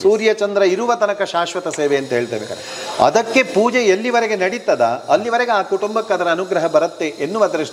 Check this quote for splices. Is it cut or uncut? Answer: uncut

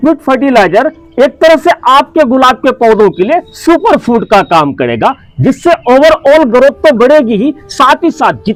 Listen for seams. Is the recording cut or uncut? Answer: uncut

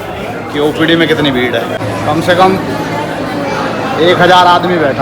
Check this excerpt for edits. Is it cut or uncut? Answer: cut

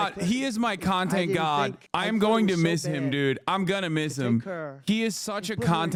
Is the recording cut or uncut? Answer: uncut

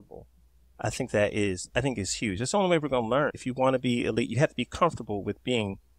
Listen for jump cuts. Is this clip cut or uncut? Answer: cut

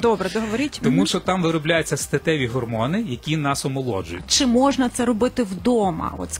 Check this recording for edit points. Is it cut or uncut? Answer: cut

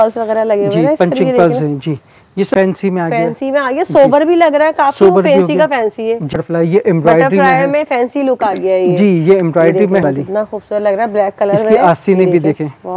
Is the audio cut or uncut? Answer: cut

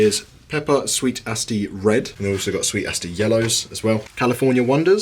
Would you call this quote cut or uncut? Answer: cut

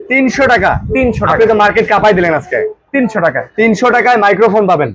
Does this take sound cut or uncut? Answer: uncut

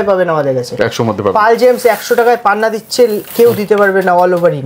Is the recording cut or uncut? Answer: uncut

